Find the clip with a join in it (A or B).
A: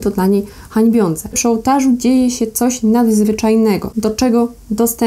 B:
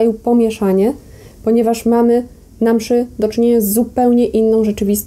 A